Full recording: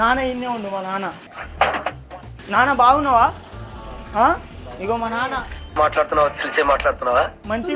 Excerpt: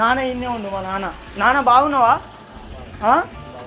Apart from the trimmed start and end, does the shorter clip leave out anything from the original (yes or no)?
yes